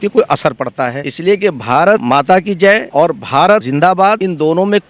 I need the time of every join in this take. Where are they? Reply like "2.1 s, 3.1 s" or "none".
1.0 s, 2.0 s, 2.9 s, 3.9 s